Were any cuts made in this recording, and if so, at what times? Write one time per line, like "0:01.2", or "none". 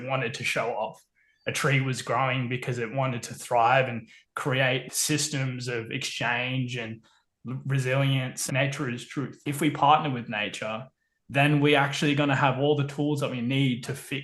0:04.9
0:08.5
0:09.4